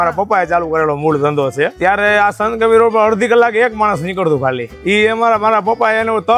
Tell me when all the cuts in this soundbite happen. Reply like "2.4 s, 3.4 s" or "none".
1.7 s, 4.7 s

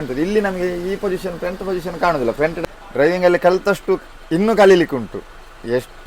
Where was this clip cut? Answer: 2.6 s

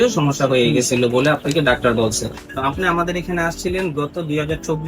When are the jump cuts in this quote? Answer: 2.4 s

